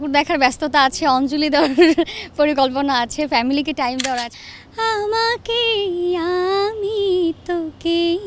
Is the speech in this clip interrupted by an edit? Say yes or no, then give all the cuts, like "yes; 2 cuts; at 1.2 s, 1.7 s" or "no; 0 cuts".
yes; 1 cut; at 4.3 s